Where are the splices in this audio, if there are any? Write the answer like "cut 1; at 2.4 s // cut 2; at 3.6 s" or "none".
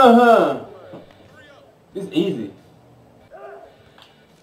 cut 1; at 3.2 s